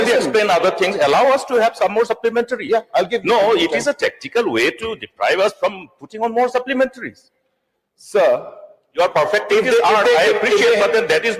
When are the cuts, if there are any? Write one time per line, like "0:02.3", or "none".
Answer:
none